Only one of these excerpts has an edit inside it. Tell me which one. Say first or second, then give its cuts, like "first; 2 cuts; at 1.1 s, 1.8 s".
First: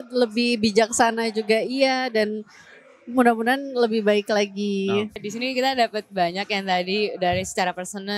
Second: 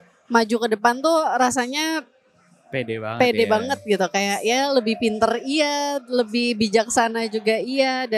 first; 1 cut; at 5.2 s